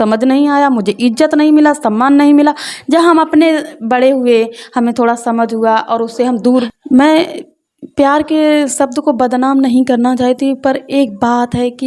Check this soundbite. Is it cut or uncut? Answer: cut